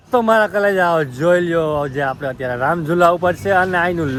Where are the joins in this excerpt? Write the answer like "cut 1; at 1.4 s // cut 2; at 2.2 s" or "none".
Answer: none